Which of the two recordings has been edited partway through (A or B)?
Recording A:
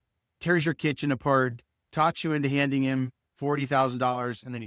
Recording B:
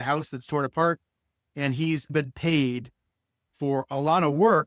B